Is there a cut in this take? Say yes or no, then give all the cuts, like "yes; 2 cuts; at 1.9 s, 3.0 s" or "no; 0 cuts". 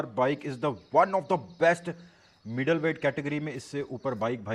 no; 0 cuts